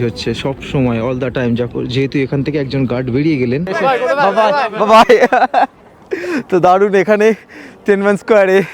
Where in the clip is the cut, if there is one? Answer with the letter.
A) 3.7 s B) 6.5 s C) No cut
A